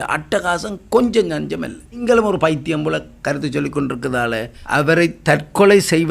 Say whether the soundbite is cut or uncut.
cut